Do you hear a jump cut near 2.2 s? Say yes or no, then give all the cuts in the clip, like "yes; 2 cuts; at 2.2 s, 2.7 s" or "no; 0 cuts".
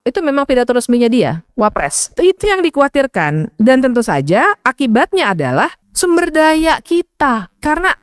yes; 2 cuts; at 2.2 s, 5.8 s